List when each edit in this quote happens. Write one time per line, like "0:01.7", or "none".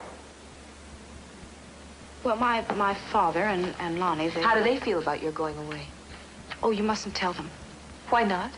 0:02.7